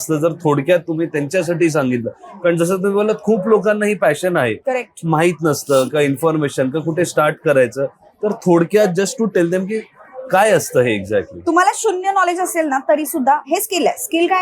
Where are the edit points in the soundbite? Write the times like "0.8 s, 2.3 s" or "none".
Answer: none